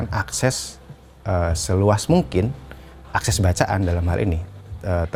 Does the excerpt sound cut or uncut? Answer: uncut